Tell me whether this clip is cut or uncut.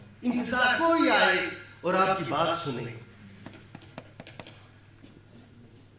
cut